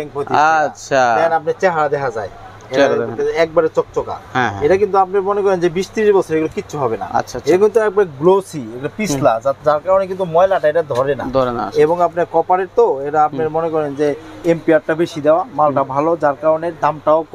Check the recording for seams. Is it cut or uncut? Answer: uncut